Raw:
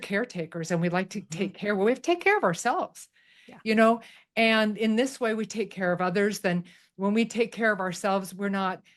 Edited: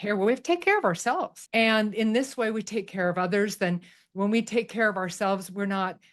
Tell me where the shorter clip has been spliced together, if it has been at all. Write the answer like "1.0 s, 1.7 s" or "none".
1.4 s